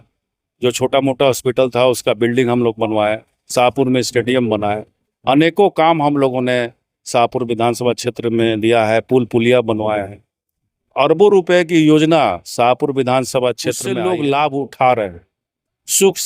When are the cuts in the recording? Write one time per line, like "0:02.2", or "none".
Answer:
0:13.9